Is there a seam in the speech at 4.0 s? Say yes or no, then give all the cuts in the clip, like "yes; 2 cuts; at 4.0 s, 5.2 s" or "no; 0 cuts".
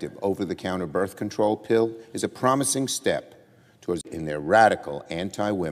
no; 0 cuts